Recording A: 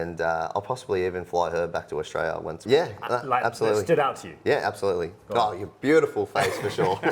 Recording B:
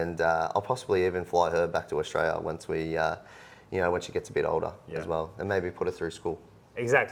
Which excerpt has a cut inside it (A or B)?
A